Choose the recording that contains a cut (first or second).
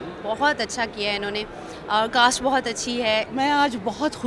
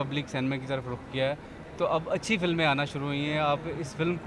first